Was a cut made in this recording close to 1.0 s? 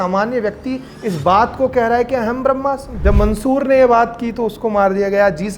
no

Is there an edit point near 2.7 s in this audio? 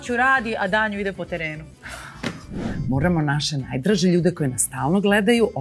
yes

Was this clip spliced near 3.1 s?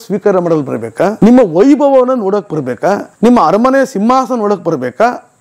yes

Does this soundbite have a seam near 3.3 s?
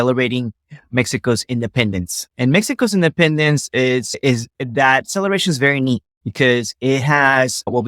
no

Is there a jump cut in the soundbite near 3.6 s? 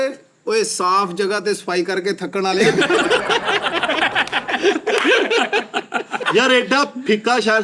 no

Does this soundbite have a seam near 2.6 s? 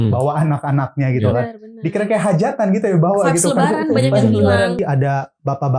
no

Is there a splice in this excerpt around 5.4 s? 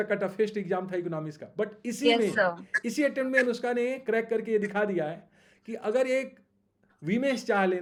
no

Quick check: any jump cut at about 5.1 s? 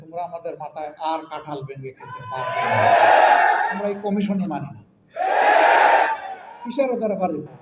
no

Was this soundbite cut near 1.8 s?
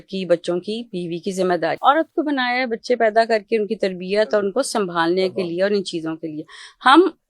yes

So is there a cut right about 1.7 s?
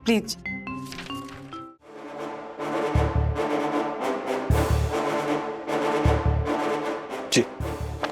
yes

